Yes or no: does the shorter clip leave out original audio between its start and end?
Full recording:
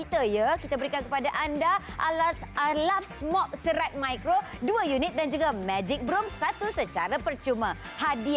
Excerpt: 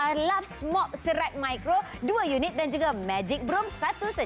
no